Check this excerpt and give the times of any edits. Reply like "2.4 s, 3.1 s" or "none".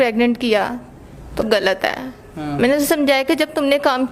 1.4 s